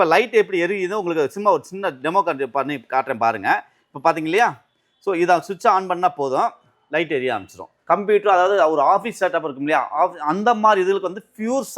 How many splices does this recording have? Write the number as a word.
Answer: one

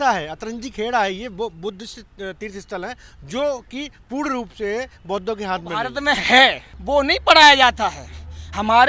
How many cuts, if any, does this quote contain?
two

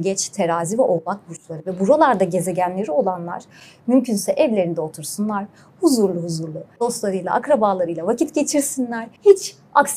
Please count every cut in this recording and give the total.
two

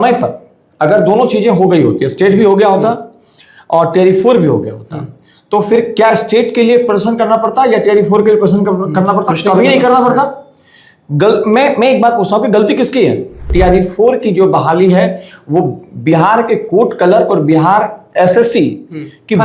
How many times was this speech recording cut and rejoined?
one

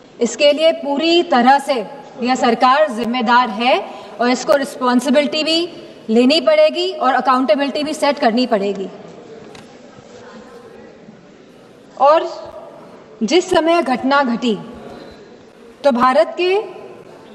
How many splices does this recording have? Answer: zero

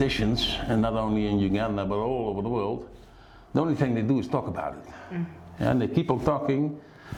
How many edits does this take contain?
zero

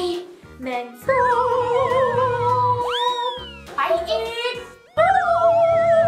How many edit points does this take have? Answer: one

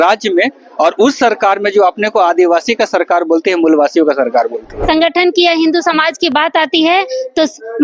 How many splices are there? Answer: one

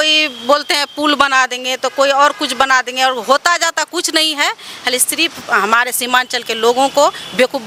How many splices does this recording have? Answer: zero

